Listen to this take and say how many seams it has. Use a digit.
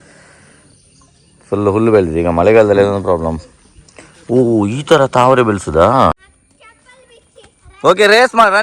1